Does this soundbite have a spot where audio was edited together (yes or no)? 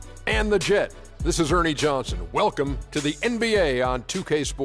no